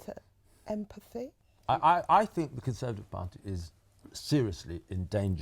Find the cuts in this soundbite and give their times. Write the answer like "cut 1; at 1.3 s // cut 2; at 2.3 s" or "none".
cut 1; at 1.4 s